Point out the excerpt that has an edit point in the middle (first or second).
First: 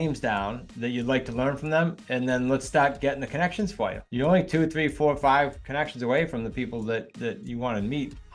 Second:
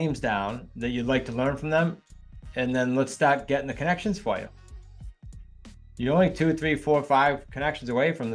first